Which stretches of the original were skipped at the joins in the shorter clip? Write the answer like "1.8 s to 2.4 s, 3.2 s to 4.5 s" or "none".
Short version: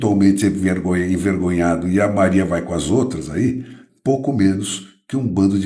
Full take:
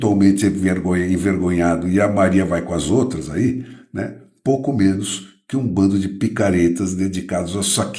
3.8 s to 4.2 s